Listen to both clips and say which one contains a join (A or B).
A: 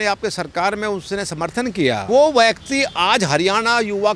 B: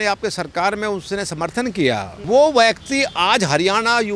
A